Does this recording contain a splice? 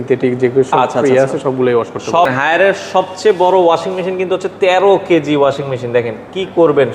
yes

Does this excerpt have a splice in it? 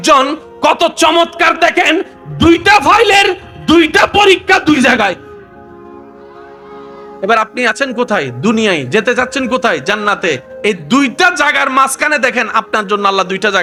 no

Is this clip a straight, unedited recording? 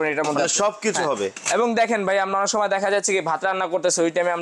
yes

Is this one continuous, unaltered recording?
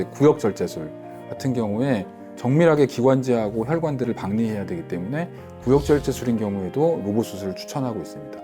yes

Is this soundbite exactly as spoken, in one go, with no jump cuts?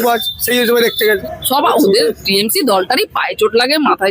no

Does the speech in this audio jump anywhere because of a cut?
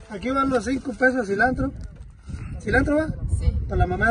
no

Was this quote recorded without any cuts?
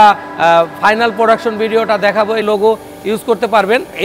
no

